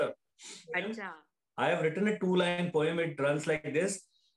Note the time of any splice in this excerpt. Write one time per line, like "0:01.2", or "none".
0:00.9